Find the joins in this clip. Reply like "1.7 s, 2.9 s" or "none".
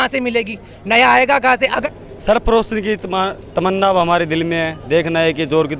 1.8 s